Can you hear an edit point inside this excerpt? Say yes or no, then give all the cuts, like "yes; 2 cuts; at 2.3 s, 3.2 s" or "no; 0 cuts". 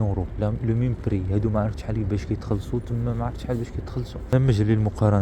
yes; 1 cut; at 4.3 s